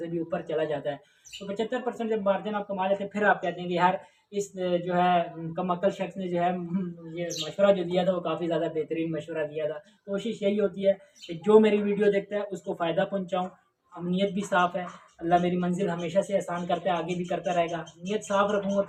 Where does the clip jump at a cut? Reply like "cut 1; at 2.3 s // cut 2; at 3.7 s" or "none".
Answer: none